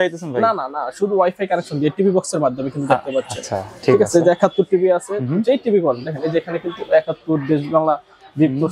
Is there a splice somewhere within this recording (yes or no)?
no